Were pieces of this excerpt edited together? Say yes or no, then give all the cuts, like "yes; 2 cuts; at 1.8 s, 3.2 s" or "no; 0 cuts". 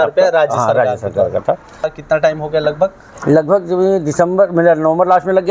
yes; 1 cut; at 1.9 s